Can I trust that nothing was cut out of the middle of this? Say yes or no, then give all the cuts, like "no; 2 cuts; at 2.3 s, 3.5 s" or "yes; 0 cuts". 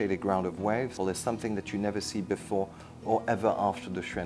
no; 1 cut; at 1.0 s